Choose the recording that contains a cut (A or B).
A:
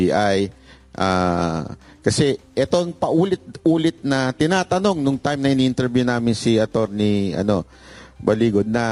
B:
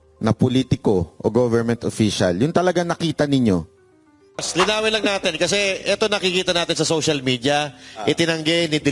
B